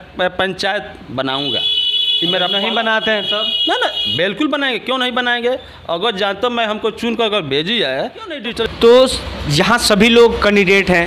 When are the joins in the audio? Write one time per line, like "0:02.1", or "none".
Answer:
0:08.6